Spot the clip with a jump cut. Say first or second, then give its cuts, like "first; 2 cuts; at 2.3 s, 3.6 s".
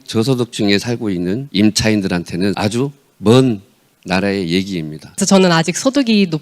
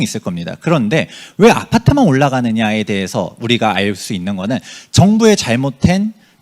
first; 3 cuts; at 1.5 s, 2.6 s, 5.0 s